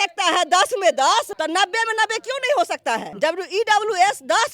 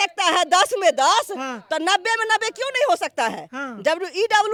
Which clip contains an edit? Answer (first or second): first